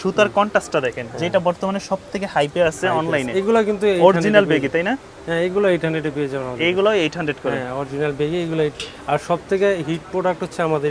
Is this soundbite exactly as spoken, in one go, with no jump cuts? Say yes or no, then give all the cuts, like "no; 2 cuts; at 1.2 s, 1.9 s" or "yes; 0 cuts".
yes; 0 cuts